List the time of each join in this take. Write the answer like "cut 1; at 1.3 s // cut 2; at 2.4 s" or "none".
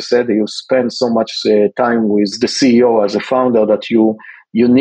cut 1; at 2.3 s